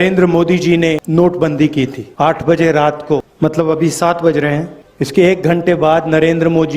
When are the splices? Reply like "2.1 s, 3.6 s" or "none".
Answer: 1.0 s, 2.0 s, 3.3 s, 4.8 s